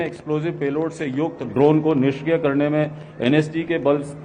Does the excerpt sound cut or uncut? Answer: uncut